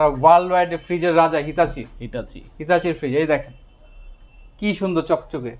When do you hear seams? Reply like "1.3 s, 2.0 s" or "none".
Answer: none